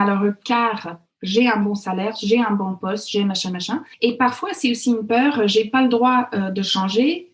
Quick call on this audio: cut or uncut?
cut